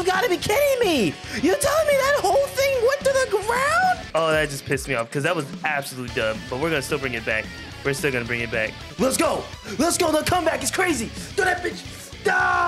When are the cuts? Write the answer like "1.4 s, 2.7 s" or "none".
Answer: 4.0 s, 8.8 s